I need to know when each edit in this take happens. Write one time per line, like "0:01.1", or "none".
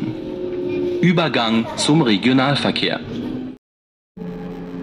0:03.5